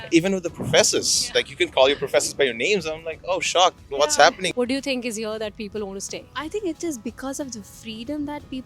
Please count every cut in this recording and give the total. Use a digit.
2